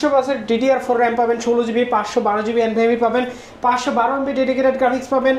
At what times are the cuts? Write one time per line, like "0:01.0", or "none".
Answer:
none